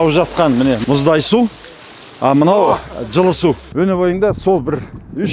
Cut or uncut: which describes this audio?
cut